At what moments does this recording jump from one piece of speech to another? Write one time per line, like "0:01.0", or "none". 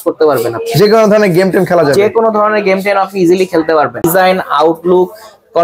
0:04.0